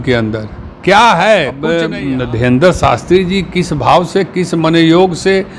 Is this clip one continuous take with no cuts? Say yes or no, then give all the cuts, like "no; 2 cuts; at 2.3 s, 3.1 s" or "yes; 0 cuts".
no; 1 cut; at 1.9 s